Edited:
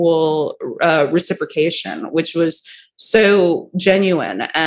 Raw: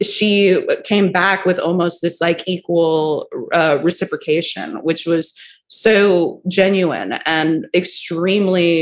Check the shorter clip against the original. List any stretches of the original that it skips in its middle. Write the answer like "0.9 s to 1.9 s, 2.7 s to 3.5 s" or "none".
none

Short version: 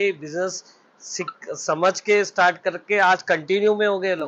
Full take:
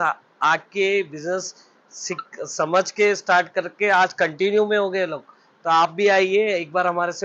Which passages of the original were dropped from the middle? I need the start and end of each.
none

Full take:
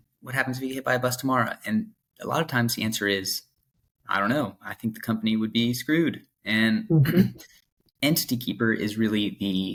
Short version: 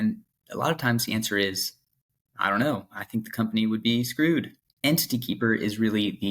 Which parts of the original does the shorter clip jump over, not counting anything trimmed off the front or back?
6.3 s to 7.8 s

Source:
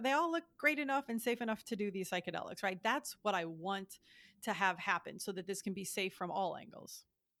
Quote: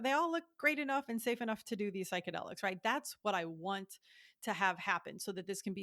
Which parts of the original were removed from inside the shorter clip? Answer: none

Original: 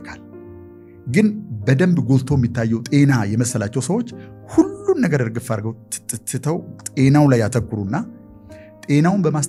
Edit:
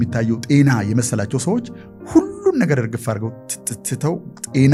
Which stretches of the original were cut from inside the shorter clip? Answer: none

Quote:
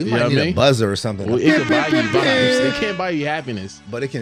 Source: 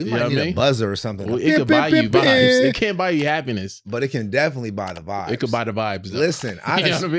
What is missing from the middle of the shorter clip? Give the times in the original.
none

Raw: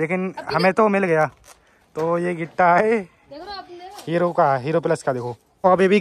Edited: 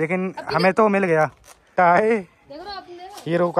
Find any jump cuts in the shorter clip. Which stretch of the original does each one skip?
1.6 s to 2.4 s

